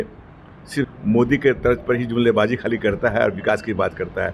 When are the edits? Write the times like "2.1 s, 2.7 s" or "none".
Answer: 0.9 s